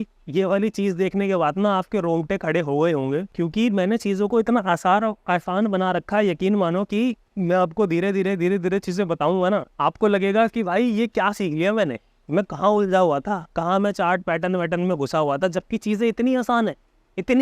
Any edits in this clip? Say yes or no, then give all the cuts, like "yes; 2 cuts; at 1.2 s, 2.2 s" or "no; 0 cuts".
yes; 3 cuts; at 3.3 s, 7.3 s, 9.7 s